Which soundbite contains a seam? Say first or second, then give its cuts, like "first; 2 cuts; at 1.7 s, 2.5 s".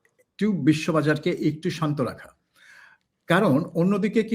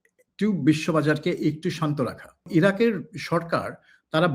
second; 1 cut; at 2.5 s